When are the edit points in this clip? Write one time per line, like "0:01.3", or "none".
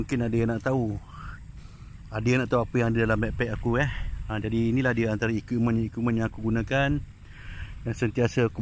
none